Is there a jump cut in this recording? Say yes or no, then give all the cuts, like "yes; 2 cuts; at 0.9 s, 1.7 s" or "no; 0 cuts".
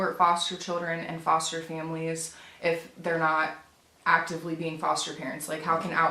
no; 0 cuts